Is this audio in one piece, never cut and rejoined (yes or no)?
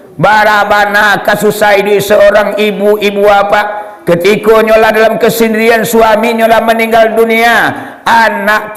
yes